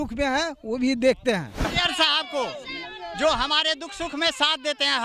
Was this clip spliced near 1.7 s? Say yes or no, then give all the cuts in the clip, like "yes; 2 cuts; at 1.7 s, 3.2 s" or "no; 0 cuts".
yes; 1 cut; at 1.7 s